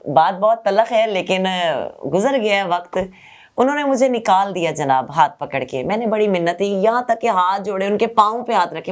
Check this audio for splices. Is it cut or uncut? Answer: uncut